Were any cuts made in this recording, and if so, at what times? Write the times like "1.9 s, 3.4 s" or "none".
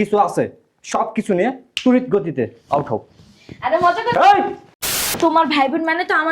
5.1 s